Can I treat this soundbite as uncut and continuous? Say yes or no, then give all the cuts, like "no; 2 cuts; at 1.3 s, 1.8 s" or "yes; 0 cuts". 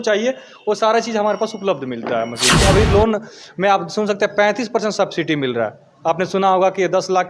no; 1 cut; at 2.6 s